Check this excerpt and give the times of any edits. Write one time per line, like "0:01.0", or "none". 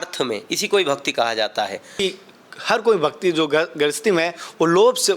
0:02.0